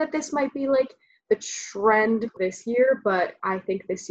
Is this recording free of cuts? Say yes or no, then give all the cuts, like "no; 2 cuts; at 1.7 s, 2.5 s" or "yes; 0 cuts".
no; 1 cut; at 2.3 s